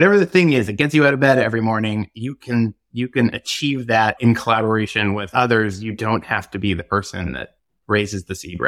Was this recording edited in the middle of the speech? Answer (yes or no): yes